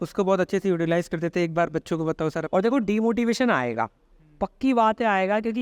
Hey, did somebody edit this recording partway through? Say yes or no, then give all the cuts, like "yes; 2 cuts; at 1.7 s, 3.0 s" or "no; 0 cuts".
yes; 1 cut; at 2.5 s